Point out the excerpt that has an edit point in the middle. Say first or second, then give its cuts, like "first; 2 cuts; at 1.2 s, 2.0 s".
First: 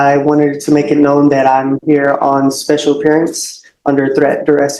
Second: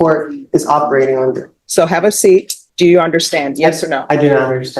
second; 2 cuts; at 1.5 s, 2.6 s